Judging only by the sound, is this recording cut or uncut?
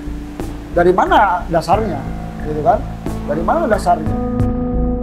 cut